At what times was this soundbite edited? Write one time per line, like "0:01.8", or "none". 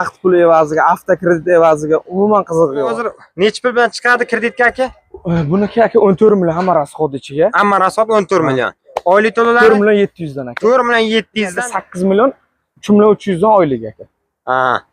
0:02.9
0:11.6